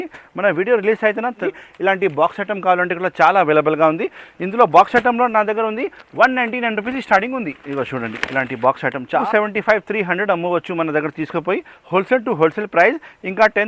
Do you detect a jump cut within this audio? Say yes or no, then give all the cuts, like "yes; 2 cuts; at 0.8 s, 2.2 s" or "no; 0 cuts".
yes; 2 cuts; at 1.5 s, 9.2 s